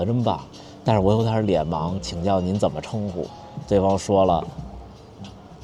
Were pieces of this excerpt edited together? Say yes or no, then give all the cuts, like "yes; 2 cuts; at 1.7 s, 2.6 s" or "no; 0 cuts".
no; 0 cuts